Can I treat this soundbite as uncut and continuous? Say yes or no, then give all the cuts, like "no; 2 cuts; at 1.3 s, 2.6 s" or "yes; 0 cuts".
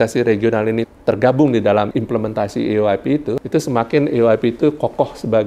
no; 3 cuts; at 0.9 s, 1.9 s, 3.4 s